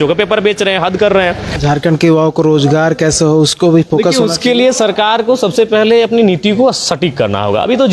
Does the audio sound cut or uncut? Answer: cut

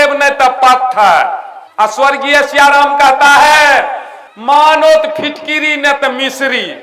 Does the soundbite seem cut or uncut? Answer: uncut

